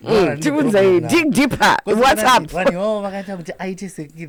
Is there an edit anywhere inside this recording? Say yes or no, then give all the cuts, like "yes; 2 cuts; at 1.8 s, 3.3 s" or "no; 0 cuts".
no; 0 cuts